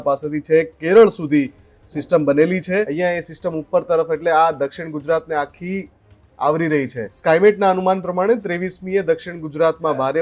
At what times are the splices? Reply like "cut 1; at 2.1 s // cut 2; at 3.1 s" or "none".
cut 1; at 2.9 s // cut 2; at 7.0 s